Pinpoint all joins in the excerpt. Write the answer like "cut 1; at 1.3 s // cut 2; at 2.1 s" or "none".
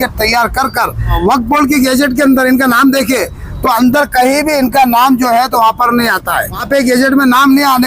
cut 1; at 1.2 s // cut 2; at 6.6 s